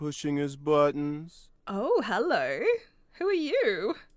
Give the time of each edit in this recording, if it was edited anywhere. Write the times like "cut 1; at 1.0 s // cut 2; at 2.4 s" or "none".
none